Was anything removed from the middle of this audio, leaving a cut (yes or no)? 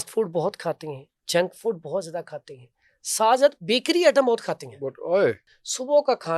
yes